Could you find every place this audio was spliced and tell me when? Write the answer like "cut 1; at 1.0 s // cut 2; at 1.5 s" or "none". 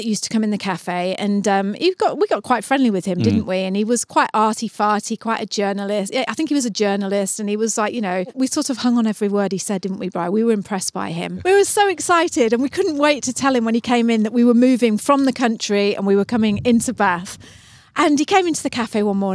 cut 1; at 8.3 s // cut 2; at 11.4 s